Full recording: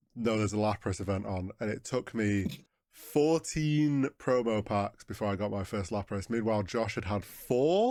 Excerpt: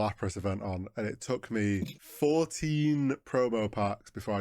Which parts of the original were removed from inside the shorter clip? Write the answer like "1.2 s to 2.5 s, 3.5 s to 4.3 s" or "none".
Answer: 2.6 s to 2.9 s

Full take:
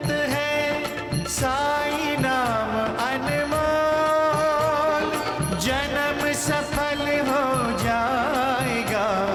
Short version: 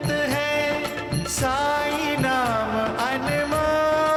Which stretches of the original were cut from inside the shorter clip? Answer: none

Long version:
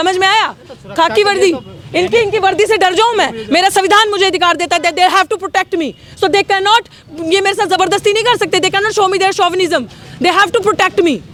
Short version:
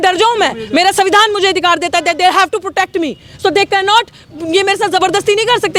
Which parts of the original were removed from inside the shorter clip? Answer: none

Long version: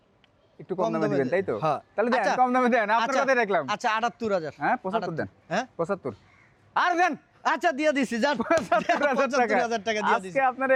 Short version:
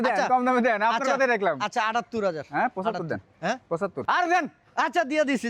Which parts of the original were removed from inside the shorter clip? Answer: 6.1 s to 6.7 s

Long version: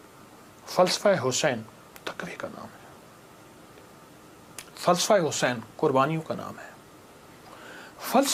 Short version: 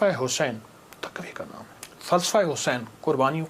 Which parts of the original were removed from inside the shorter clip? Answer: 2.9 s to 4.6 s

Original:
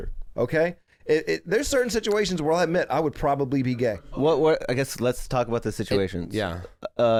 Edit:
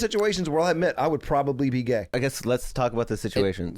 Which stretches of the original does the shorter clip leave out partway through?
4.0 s to 4.7 s

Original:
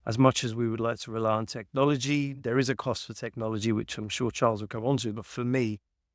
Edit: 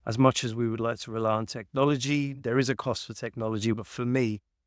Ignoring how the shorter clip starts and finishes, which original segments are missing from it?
3.7 s to 5.1 s

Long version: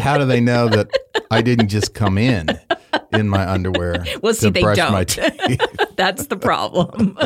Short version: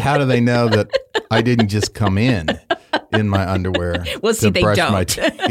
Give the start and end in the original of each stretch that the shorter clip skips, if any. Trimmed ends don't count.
none

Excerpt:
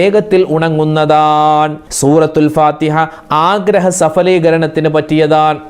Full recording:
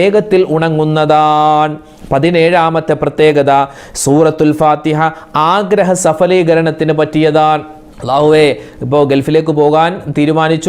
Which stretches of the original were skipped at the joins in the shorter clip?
1.8 s to 3.9 s

